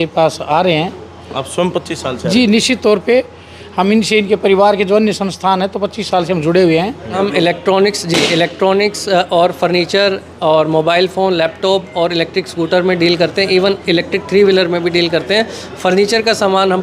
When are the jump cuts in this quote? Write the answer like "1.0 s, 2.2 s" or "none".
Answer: 7.2 s